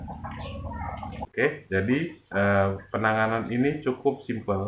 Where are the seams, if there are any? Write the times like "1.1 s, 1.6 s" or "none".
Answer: 1.2 s